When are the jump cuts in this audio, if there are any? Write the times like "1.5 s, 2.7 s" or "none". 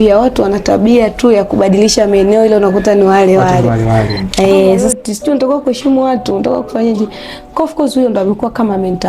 4.9 s